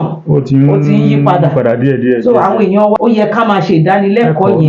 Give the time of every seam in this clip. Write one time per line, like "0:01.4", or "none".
0:03.0

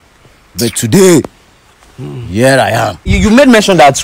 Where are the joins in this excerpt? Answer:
0:03.0

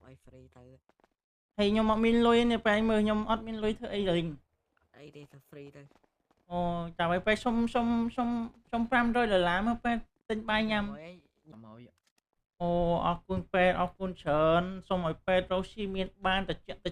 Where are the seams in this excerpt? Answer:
0:11.5

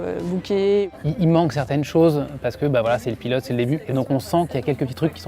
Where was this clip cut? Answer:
0:00.9
0:03.9

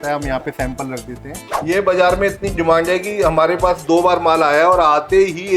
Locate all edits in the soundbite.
0:01.5

